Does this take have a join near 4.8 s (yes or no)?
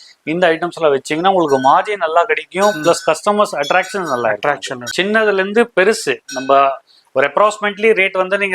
yes